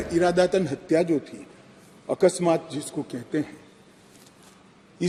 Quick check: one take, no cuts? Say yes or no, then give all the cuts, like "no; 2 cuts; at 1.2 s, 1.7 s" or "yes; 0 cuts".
yes; 0 cuts